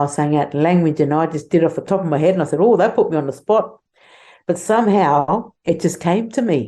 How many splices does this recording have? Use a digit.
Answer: 1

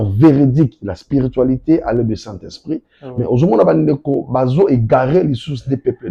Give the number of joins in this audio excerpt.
0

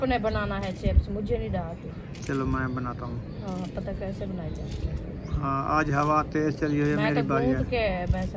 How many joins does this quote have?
0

